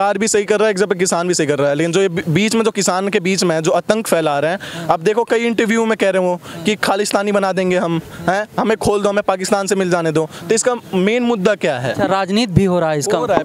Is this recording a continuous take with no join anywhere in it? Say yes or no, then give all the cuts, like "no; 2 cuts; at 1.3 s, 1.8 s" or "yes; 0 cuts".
yes; 0 cuts